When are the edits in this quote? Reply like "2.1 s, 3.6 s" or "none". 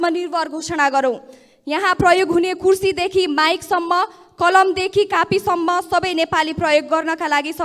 none